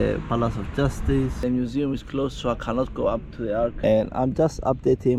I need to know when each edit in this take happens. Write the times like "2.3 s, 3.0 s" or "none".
1.3 s